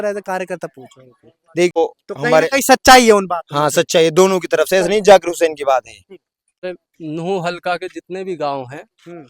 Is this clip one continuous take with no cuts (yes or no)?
no